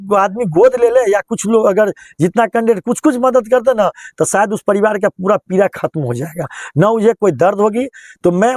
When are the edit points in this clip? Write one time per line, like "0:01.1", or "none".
none